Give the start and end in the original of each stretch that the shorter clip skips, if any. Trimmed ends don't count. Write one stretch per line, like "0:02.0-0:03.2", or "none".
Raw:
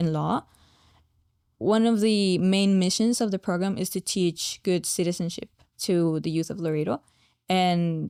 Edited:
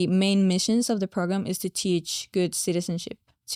none